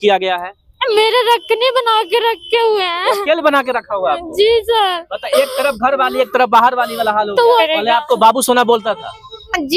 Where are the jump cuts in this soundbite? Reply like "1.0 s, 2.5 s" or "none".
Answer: 7.6 s